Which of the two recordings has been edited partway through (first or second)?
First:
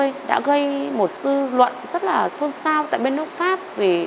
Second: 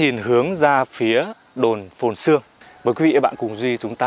second